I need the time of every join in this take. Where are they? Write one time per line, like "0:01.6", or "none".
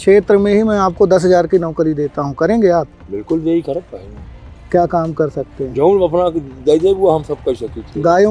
none